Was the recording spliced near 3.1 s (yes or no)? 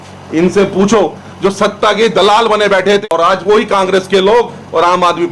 yes